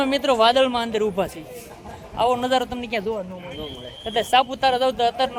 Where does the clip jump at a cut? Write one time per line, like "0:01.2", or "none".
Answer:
none